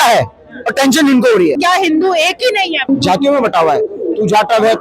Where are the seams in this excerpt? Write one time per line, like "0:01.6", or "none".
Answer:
0:01.6
0:02.9